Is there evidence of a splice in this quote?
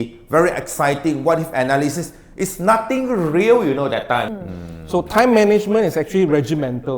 yes; 1 cut; at 4.3 s

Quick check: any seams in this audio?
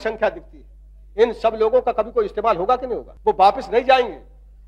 yes; 1 cut; at 3.1 s

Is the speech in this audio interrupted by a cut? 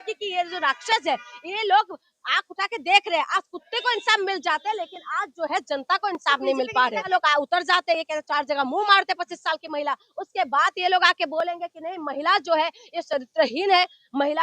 yes; 1 cut; at 7.1 s

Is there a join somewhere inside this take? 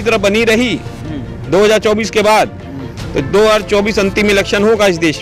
no; 0 cuts

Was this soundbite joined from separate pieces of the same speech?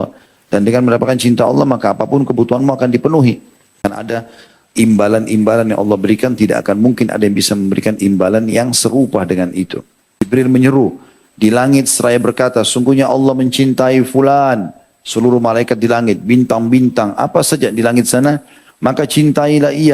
yes; 2 cuts; at 3.8 s, 10.1 s

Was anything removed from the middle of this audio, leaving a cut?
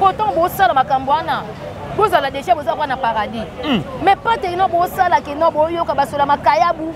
no; 0 cuts

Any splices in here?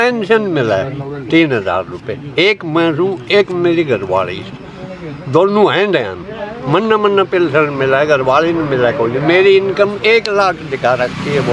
no; 0 cuts

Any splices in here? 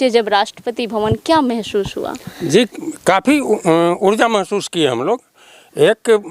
no; 0 cuts

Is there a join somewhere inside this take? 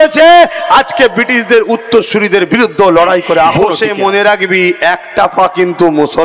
yes; 1 cut; at 3.5 s

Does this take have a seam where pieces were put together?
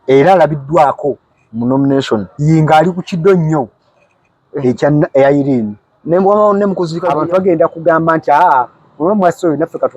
yes; 1 cut; at 7.0 s

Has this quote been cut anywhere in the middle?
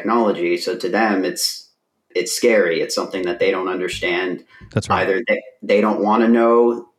no; 0 cuts

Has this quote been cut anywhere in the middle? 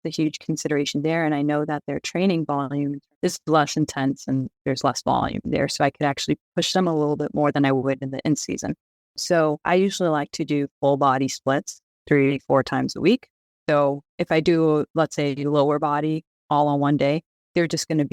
yes; 1 cut; at 9.3 s

